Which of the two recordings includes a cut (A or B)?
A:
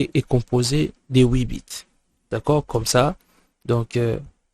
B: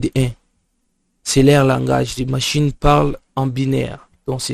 A